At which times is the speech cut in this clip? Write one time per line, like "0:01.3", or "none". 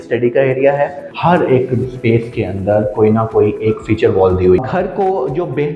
0:01.1
0:04.6